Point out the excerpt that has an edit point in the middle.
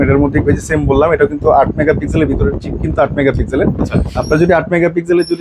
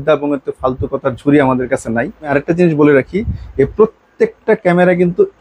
second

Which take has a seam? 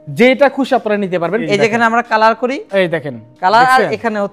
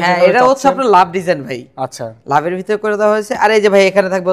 first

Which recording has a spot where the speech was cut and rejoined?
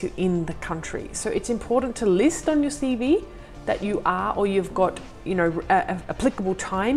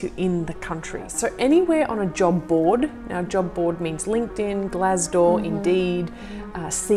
second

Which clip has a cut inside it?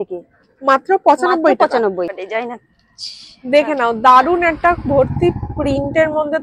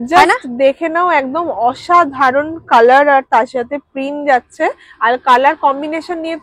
first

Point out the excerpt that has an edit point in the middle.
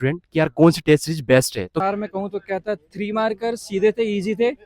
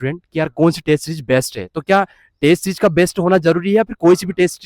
first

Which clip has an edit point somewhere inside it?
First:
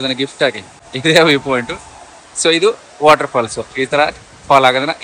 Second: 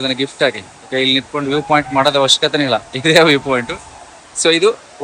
first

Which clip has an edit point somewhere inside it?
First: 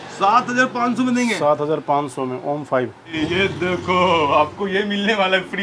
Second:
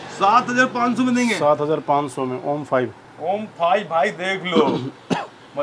first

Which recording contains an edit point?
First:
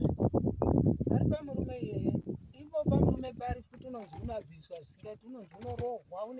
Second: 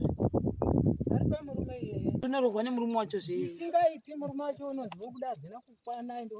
second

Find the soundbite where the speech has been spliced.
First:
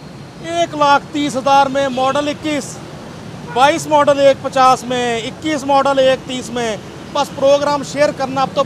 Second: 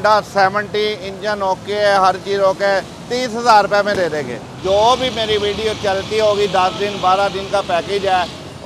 second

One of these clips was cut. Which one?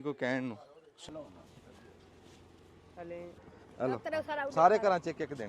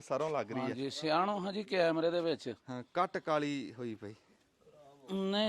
first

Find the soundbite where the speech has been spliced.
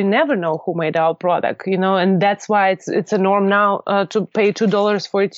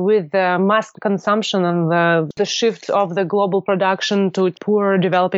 second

